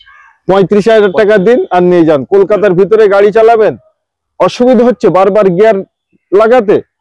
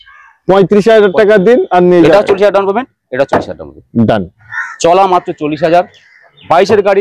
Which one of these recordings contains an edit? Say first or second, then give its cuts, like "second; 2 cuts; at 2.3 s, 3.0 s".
second; 2 cuts; at 2.1 s, 4.4 s